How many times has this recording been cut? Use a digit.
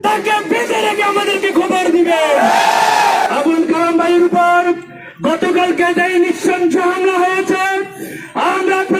1